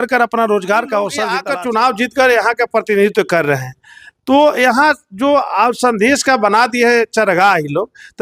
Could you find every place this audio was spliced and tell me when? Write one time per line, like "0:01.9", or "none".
0:01.3